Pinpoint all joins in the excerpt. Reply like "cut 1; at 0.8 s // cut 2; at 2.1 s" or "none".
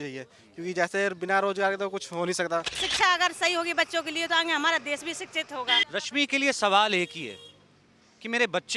cut 1; at 2.8 s // cut 2; at 5.9 s